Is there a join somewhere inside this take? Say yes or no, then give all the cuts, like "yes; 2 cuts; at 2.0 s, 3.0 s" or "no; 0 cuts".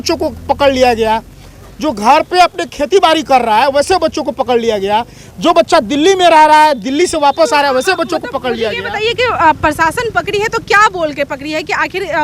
no; 0 cuts